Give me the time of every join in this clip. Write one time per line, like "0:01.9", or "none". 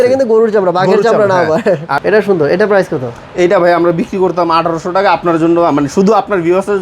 0:01.9